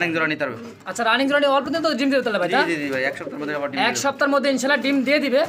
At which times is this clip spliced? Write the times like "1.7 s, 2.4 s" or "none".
none